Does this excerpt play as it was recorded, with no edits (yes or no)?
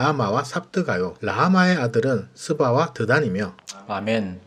yes